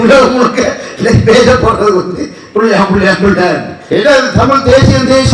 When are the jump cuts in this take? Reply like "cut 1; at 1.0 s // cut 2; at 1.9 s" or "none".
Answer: cut 1; at 3.7 s